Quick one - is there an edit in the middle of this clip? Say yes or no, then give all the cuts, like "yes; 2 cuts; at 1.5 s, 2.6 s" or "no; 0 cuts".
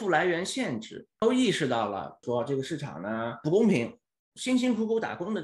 yes; 2 cuts; at 1.0 s, 2.1 s